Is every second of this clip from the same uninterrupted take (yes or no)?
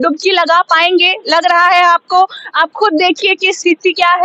yes